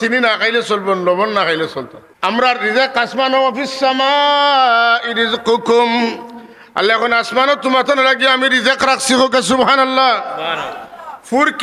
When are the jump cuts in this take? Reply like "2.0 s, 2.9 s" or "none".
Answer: 2.0 s

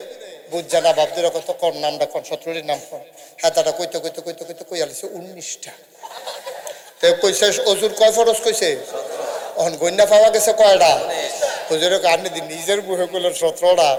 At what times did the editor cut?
none

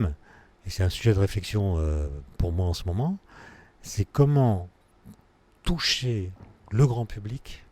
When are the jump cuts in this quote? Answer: none

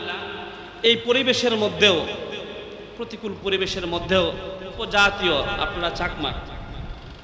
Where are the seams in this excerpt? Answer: 4.8 s

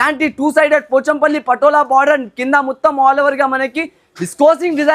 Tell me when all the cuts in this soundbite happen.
none

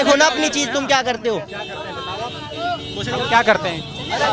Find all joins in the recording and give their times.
none

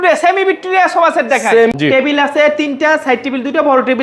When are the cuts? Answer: 1.7 s

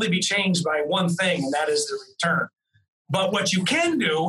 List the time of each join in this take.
none

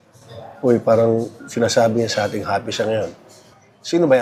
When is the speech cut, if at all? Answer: none

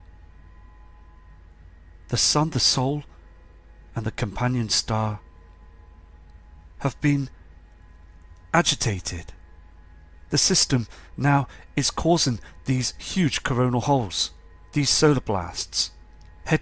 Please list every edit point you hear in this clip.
none

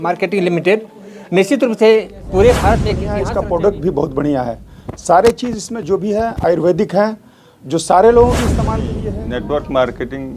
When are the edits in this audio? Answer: 3.1 s, 9.0 s

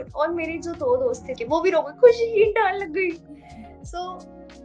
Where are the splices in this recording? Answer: 1.3 s

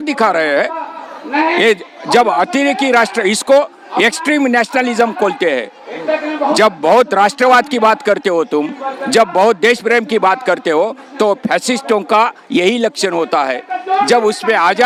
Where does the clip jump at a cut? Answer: none

